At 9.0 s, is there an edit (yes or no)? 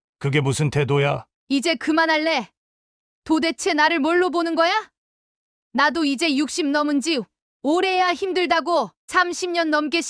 yes